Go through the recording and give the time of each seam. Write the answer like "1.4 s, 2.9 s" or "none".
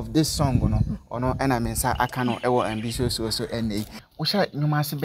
4.0 s